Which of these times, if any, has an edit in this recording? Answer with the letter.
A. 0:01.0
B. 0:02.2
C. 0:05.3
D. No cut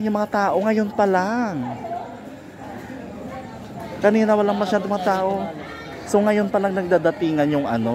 D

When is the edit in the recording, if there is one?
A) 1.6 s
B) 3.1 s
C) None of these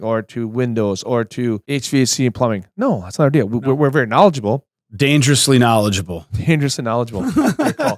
A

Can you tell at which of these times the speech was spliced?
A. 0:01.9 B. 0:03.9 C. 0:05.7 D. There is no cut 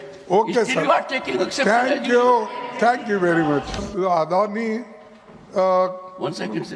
B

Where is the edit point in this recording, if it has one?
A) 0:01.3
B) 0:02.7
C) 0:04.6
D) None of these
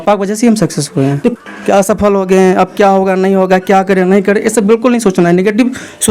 A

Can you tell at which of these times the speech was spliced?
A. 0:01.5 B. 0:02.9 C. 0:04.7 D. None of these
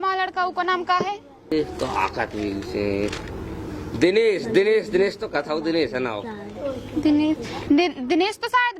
A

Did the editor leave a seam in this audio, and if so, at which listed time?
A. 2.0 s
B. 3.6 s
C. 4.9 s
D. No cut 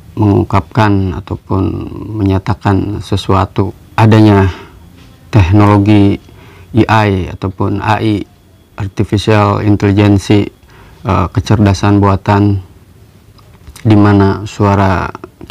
B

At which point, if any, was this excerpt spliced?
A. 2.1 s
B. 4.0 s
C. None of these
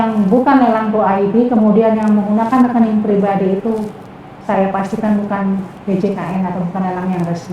C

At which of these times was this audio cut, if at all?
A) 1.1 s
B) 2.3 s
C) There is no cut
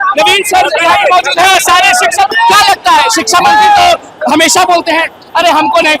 B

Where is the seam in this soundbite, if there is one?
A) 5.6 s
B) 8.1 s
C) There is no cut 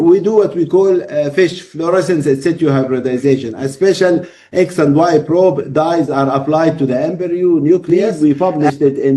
B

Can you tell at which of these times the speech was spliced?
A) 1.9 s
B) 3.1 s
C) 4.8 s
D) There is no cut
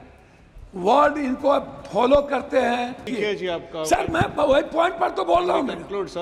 B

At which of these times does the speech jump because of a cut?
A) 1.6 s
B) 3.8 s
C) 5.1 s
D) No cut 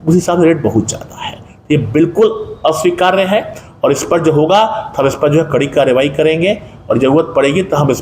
D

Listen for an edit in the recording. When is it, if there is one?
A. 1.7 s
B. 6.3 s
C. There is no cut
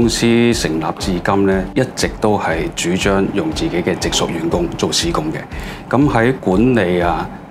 A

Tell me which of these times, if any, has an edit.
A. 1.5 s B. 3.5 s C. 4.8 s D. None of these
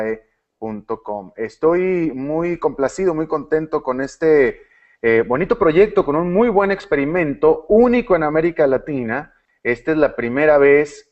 D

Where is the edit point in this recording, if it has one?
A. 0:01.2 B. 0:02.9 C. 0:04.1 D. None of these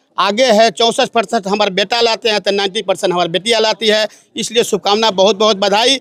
D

